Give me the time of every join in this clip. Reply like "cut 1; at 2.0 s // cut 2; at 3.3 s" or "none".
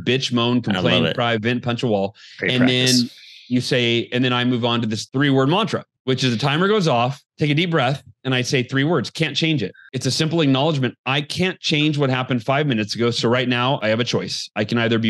cut 1; at 5.0 s // cut 2; at 13.8 s

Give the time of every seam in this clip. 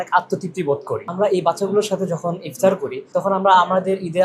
cut 1; at 1.1 s

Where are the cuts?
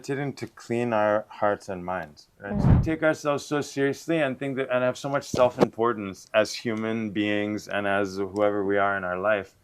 cut 1; at 2.8 s

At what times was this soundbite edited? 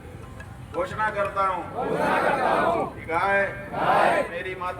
none

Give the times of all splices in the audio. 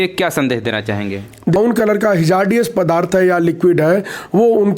cut 1; at 1.6 s

